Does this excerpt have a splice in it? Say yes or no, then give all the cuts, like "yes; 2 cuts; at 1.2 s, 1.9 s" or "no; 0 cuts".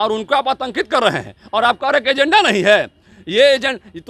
no; 0 cuts